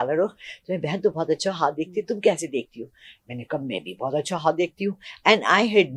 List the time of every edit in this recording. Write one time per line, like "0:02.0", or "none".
none